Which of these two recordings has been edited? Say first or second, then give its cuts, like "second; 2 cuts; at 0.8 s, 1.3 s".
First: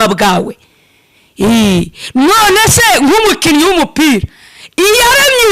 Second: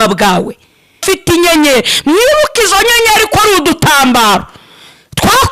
second; 1 cut; at 1.0 s